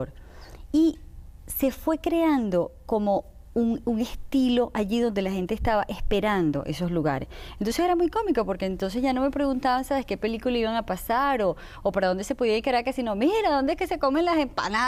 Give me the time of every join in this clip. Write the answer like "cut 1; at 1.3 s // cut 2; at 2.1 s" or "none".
none